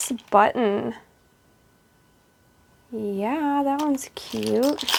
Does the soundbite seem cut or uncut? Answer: uncut